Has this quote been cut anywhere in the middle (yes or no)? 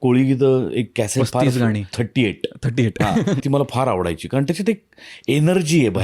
yes